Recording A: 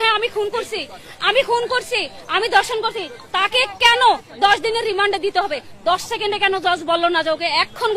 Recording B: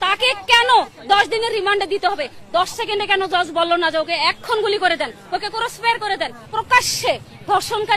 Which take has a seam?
B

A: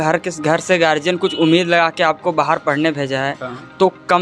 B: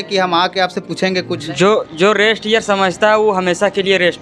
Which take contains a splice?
B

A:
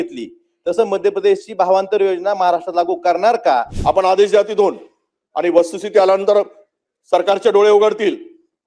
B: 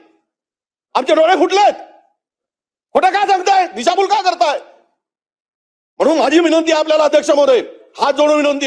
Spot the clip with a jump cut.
A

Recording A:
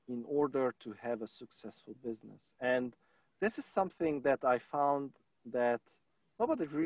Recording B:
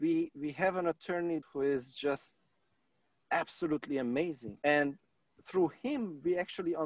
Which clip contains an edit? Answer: B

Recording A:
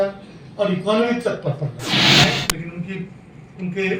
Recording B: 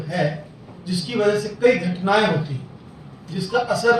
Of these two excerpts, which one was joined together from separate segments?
A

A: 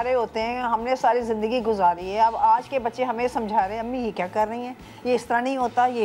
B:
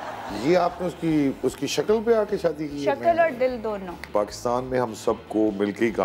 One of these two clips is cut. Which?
B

